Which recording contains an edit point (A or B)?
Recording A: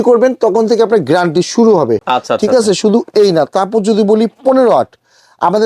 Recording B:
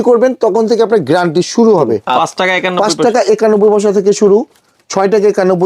B